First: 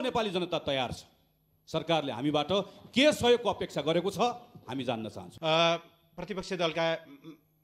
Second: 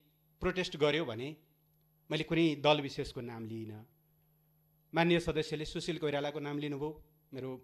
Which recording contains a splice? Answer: first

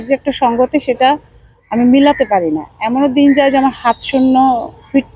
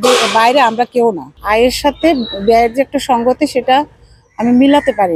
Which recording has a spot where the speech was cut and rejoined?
second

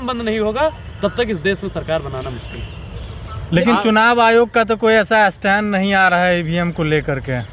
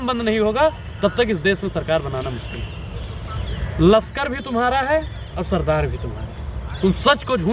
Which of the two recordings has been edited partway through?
second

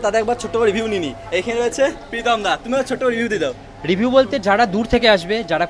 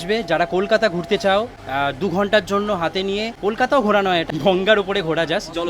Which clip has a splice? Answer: second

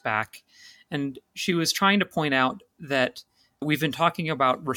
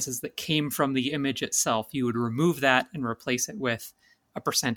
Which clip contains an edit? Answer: first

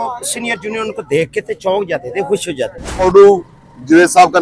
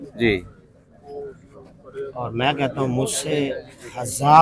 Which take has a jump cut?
first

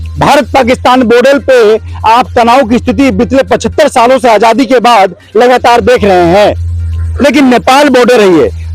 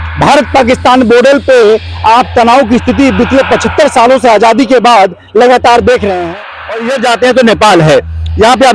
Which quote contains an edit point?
second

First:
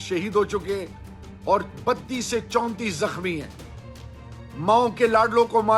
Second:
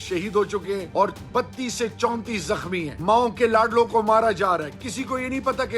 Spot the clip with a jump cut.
second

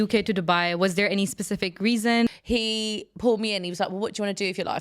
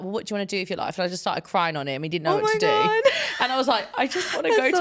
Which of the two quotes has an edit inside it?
first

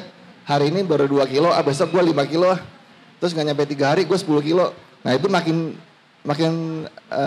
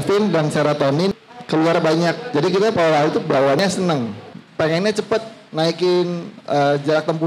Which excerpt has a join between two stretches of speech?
second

